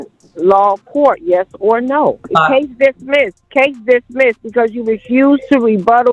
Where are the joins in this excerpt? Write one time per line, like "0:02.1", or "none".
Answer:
0:02.2
0:03.4